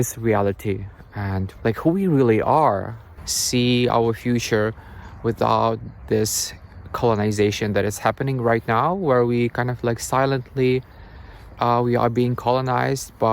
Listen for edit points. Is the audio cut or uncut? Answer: cut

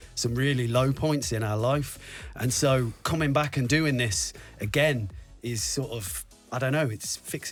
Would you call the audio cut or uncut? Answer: uncut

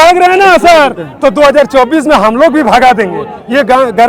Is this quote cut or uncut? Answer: uncut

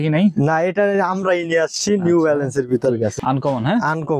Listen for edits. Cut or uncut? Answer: cut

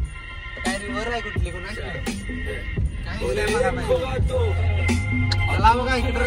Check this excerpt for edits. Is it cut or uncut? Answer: uncut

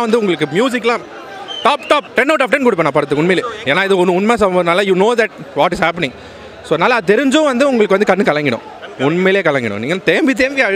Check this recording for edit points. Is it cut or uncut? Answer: cut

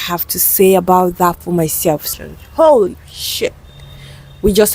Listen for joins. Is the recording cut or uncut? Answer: cut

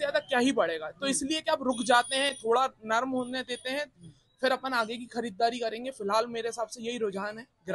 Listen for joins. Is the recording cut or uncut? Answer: uncut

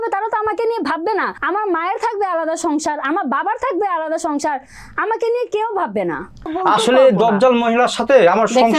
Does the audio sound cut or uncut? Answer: cut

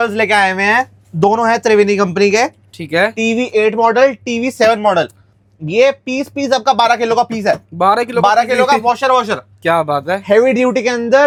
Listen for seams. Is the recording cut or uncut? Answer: uncut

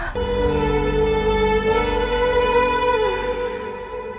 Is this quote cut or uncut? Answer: uncut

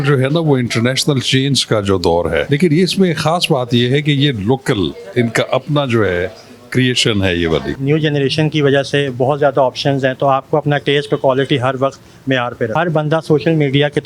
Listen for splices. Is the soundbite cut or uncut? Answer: cut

